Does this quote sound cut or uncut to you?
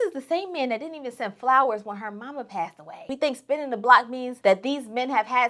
cut